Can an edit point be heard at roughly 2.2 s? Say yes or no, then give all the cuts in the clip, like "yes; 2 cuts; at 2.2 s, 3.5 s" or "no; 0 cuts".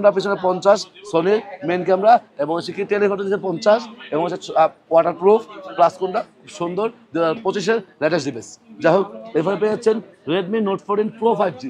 no; 0 cuts